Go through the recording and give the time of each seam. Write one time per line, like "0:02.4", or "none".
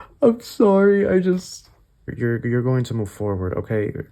0:02.1

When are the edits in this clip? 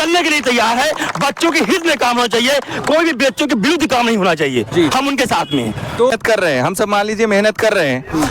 0:06.1

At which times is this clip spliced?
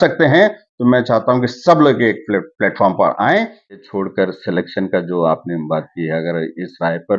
0:03.9

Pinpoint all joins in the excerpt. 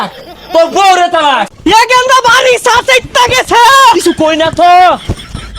0:01.5

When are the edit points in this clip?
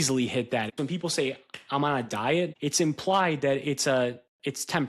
0:00.8
0:02.5

